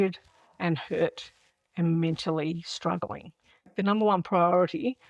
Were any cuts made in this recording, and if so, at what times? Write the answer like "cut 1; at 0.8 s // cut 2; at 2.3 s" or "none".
cut 1; at 3.7 s